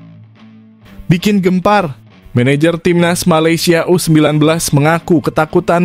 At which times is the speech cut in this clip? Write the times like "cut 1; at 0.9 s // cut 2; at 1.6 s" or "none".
none